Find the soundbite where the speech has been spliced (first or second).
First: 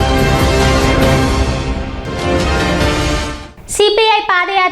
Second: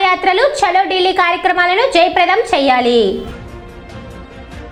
first